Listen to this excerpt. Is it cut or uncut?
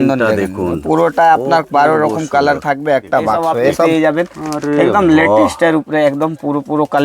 cut